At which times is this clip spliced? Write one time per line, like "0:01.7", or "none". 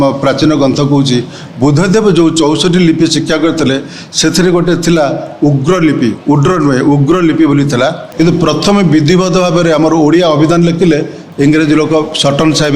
0:08.0
0:11.2